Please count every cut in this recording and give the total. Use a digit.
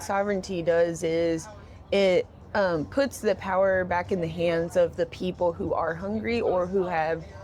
0